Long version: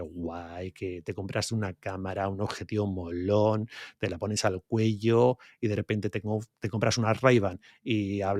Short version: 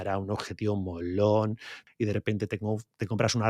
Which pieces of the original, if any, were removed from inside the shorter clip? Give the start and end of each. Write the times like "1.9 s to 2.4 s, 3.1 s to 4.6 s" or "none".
3.9 s to 5.4 s